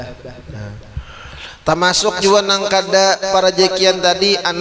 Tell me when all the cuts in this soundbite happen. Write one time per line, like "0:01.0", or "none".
none